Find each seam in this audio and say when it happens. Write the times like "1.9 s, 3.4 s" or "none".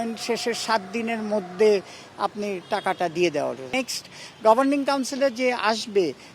3.7 s

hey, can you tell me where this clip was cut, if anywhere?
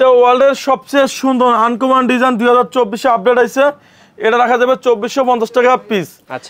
none

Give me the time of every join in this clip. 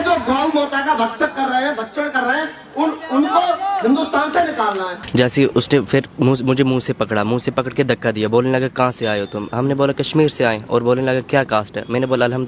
5.0 s

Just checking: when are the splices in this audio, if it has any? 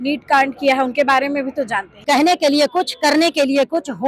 1.9 s

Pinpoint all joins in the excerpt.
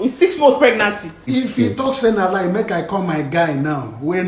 1.2 s

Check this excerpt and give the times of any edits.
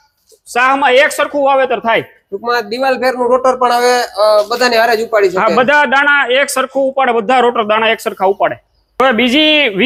none

